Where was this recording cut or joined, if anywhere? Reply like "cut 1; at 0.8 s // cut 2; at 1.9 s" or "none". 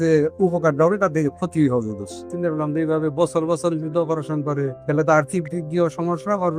cut 1; at 2.3 s // cut 2; at 4.8 s